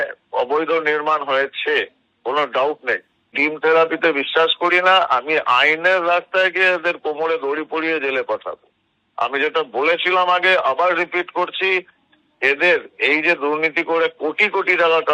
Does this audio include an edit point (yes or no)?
yes